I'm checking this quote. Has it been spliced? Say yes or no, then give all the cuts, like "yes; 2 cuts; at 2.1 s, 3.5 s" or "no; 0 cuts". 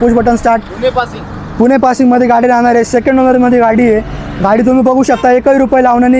no; 0 cuts